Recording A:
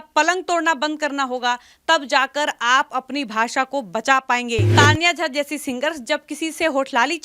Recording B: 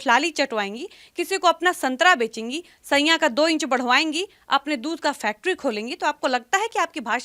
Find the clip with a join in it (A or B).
A